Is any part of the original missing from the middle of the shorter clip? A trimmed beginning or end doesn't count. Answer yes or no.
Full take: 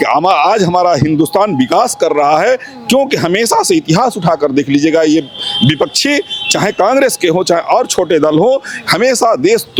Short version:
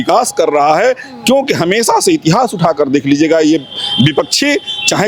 no